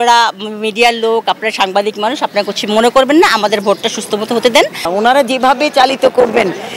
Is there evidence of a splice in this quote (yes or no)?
yes